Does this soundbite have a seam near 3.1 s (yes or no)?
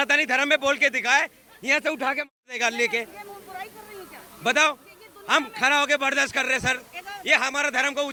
no